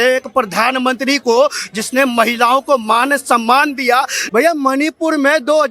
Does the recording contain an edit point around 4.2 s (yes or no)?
yes